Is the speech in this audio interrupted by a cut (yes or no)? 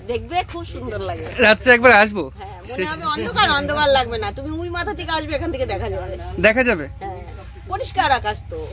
no